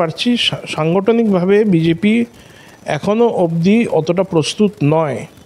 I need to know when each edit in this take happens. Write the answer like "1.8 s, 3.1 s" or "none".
none